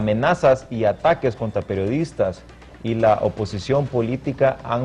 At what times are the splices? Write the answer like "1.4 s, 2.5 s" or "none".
none